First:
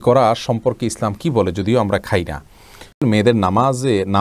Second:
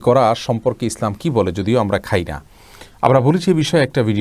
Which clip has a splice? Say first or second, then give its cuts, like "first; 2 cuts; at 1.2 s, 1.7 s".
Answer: first; 1 cut; at 3.0 s